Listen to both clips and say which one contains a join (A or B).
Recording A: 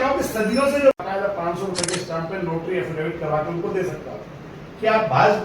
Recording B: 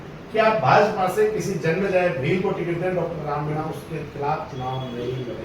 A